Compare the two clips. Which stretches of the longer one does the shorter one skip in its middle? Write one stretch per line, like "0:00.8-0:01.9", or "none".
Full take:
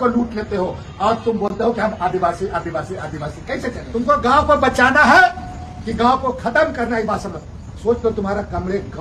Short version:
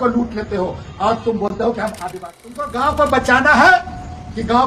0:02.1-0:03.6